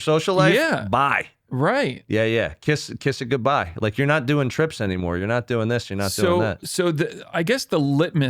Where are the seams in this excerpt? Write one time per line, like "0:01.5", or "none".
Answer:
none